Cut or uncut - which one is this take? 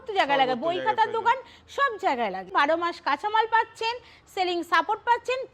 cut